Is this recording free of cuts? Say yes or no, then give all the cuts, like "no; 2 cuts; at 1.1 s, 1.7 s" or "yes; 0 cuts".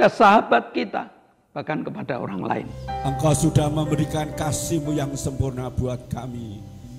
no; 1 cut; at 2.8 s